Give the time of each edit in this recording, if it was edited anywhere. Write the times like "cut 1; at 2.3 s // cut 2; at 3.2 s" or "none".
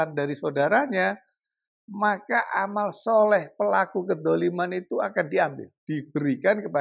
cut 1; at 5.7 s